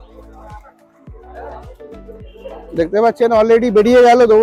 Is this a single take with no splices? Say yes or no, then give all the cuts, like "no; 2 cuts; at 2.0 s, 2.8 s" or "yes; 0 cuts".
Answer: yes; 0 cuts